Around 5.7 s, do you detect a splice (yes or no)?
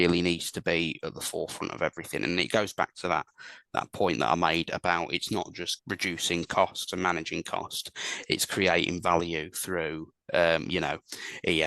yes